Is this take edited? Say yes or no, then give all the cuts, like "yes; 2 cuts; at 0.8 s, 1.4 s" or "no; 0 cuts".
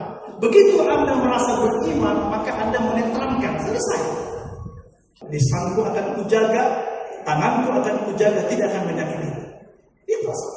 yes; 1 cut; at 5.0 s